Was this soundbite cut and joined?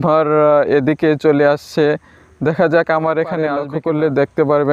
yes; 1 cut; at 3.7 s

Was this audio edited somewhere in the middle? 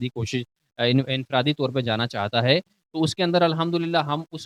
no; 0 cuts

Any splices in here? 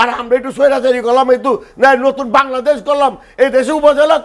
no; 0 cuts

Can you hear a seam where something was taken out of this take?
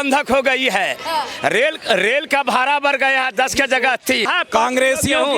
yes; 1 cut; at 4.3 s

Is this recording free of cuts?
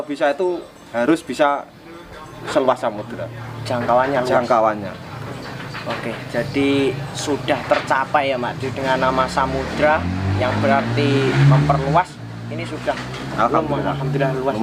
yes; 0 cuts

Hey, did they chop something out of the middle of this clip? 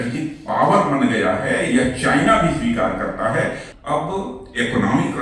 yes; 1 cut; at 3.7 s

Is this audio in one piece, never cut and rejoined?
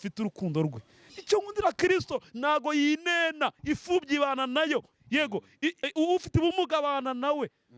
no; 2 cuts; at 1.1 s, 5.8 s

